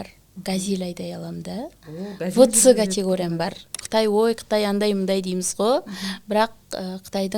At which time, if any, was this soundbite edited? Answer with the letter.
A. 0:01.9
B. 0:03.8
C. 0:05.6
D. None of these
B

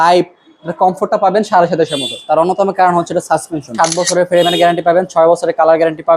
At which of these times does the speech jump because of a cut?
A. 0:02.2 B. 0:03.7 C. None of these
B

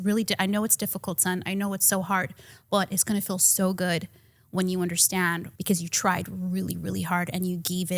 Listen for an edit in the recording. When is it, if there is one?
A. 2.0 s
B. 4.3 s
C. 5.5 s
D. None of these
C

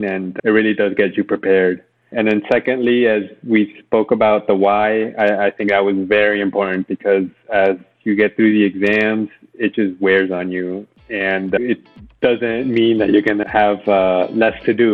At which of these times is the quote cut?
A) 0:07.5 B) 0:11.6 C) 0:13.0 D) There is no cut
B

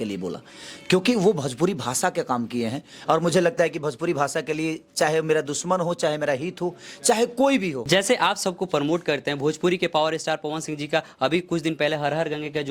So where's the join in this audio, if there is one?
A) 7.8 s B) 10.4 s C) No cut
A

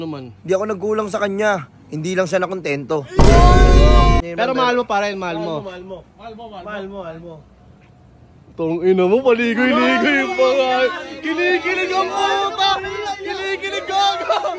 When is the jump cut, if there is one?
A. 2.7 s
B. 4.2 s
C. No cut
B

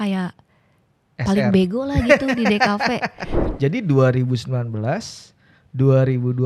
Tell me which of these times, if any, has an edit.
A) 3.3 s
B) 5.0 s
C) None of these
A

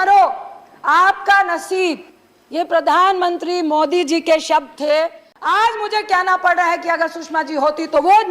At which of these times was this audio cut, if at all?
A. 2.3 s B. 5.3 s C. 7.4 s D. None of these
B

